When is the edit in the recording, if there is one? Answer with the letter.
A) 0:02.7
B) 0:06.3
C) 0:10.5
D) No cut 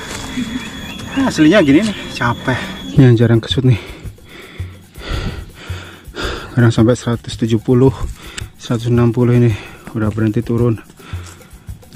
A